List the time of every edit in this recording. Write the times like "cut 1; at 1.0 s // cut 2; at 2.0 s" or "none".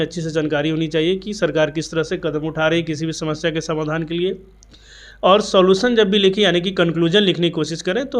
none